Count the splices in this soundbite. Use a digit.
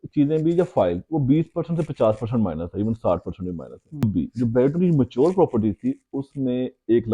1